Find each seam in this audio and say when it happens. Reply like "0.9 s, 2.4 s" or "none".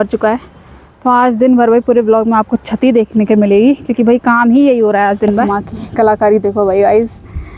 5.5 s